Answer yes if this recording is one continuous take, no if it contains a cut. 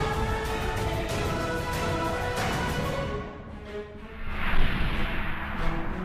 yes